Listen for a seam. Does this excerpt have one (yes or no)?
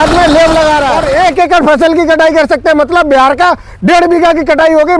yes